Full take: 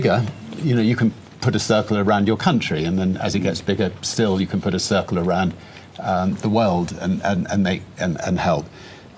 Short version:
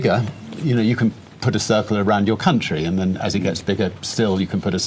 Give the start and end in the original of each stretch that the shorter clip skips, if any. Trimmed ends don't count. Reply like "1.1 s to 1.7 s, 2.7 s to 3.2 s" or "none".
none